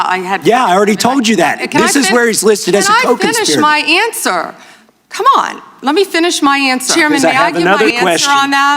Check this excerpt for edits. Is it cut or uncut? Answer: cut